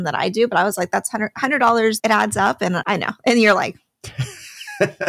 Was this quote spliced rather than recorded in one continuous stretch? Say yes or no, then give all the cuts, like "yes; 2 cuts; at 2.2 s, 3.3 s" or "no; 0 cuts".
yes; 2 cuts; at 2.0 s, 2.8 s